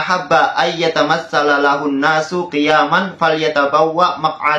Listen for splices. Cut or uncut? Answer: uncut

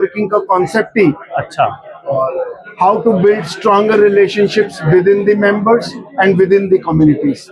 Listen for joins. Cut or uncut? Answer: uncut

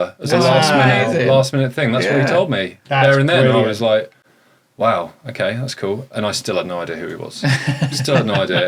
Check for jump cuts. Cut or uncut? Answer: uncut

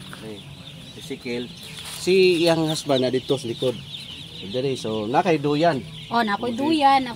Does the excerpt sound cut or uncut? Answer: uncut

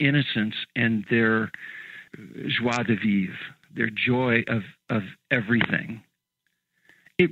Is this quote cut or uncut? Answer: cut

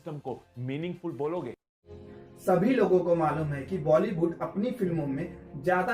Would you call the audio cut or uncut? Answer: cut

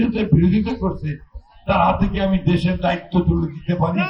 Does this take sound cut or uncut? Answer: uncut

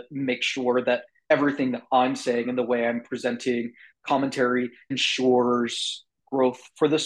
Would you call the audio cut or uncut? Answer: uncut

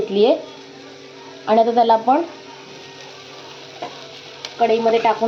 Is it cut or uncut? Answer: uncut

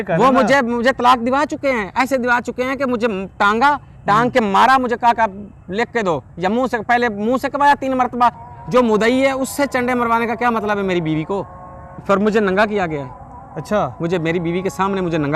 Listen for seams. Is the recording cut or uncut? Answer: cut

